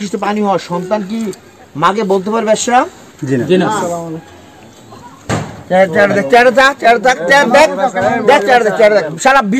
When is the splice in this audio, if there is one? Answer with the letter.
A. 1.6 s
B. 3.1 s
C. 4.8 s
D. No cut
C